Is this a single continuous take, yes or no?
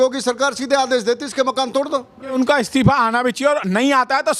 no